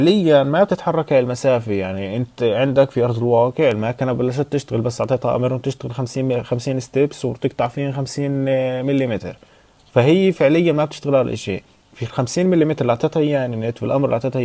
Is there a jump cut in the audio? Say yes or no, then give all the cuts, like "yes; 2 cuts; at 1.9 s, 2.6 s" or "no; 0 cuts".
no; 0 cuts